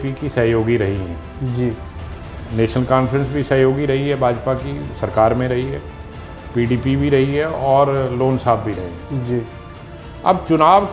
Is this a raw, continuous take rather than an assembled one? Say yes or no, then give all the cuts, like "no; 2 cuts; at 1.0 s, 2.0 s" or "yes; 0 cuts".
yes; 0 cuts